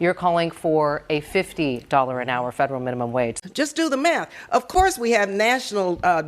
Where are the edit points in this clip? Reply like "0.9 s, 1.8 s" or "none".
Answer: 3.3 s